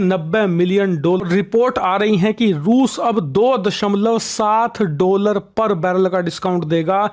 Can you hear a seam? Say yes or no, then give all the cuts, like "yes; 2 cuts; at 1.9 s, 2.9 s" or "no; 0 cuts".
yes; 1 cut; at 1.2 s